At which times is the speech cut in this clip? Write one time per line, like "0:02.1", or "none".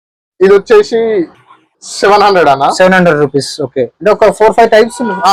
none